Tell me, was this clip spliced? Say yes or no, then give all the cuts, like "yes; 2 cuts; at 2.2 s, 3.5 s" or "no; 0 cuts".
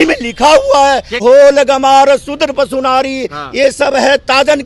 yes; 1 cut; at 1.1 s